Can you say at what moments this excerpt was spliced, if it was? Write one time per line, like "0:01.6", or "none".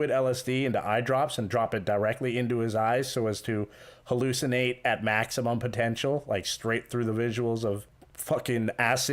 none